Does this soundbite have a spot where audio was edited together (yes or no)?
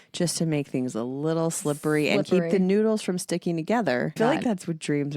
yes